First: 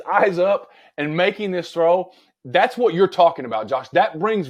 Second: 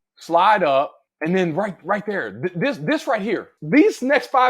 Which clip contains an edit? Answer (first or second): second